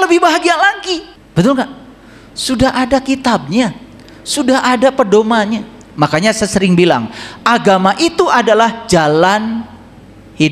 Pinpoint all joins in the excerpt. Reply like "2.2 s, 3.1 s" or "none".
1.2 s